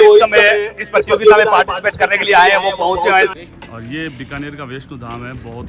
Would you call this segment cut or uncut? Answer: cut